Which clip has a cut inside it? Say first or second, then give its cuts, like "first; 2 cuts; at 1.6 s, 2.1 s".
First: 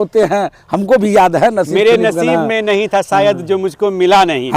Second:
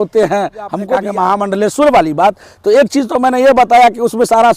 second; 1 cut; at 1.0 s